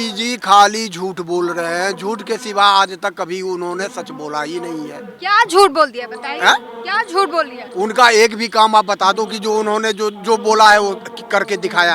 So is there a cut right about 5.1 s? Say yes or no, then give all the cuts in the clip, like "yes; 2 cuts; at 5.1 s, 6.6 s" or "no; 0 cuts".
no; 0 cuts